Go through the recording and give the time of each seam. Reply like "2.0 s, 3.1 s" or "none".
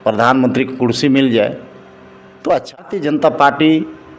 3.0 s